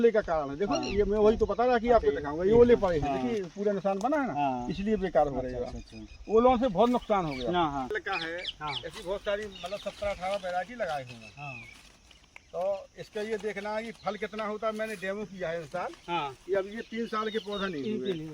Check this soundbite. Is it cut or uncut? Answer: cut